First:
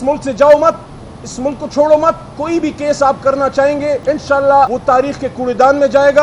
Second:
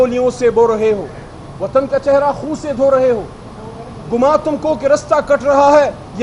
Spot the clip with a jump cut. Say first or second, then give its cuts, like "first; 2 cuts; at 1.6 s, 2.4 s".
first; 3 cuts; at 2.3 s, 4.0 s, 4.8 s